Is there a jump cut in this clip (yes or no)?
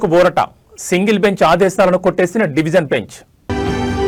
no